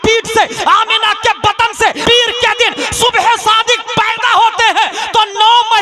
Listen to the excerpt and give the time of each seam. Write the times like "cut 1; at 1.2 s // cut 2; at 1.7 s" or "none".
cut 1; at 2.0 s